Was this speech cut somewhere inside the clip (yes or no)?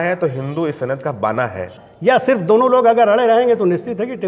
yes